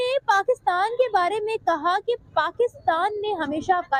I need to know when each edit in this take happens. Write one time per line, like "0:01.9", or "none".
none